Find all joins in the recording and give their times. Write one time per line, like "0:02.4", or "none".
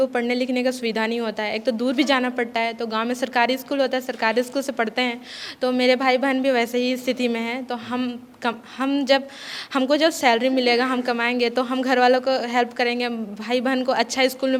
none